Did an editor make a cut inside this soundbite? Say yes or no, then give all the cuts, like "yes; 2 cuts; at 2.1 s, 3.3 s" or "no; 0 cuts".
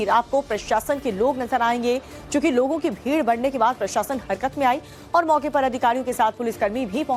no; 0 cuts